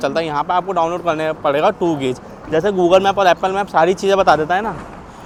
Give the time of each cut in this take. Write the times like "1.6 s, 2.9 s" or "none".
none